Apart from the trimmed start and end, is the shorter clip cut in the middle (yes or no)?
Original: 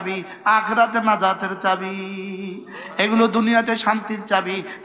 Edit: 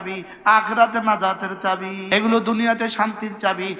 yes